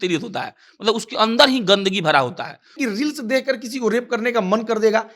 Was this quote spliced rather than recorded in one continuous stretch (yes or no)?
yes